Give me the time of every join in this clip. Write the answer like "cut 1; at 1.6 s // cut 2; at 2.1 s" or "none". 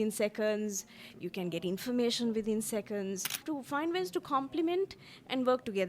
cut 1; at 3.4 s

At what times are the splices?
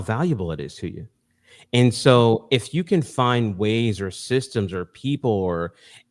none

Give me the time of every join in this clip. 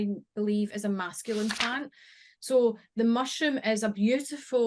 none

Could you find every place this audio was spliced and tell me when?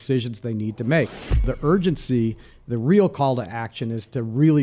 cut 1; at 1.5 s

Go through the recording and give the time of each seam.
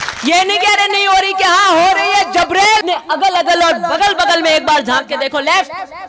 cut 1; at 2.8 s

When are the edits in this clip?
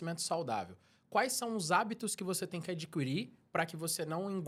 none

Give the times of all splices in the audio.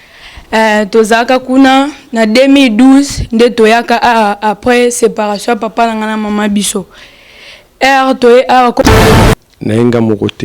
cut 1; at 9.2 s

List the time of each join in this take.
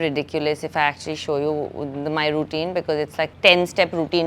cut 1; at 3.3 s

